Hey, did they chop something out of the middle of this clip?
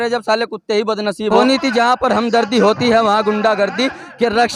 yes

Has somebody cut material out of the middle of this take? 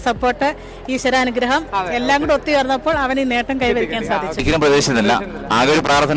yes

